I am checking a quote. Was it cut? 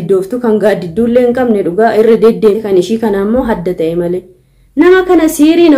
yes; 1 cut; at 2.6 s

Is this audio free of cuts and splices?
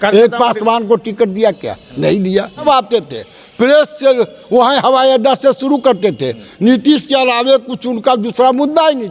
no; 1 cut; at 2.6 s

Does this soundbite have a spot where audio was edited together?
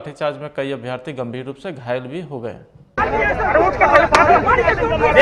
no; 0 cuts

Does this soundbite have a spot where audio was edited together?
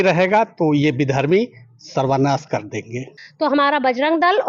yes; 1 cut; at 3.2 s

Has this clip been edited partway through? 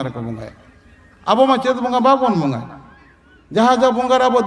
no; 0 cuts

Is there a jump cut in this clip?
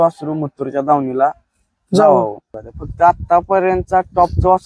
yes; 1 cut; at 2.6 s

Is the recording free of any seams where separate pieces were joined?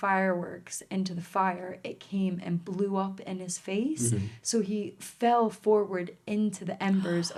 yes; 0 cuts

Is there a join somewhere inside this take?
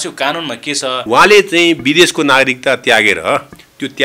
yes; 1 cut; at 1.0 s

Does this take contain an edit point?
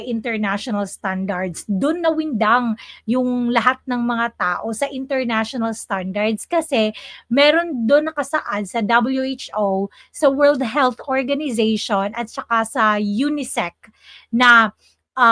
no; 0 cuts

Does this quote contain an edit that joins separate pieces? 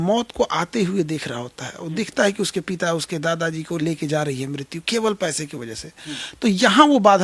no; 0 cuts

